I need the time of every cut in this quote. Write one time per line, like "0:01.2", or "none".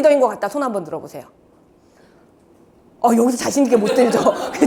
none